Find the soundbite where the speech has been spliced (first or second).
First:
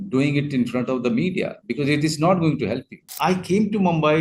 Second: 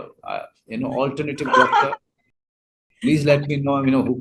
first